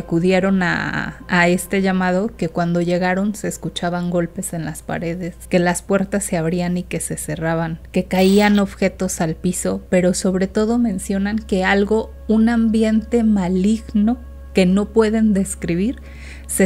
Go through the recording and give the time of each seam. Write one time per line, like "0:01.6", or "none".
0:05.4
0:07.8
0:12.1